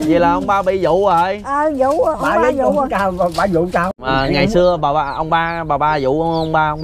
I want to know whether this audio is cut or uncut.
cut